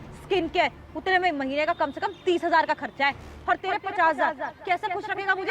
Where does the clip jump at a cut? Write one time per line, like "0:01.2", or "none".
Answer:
0:03.3
0:04.4